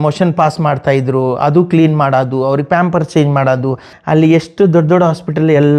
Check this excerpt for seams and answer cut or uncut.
cut